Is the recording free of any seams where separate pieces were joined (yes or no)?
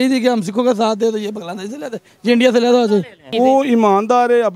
no